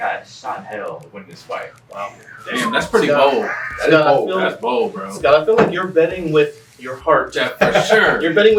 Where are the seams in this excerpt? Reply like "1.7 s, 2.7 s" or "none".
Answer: none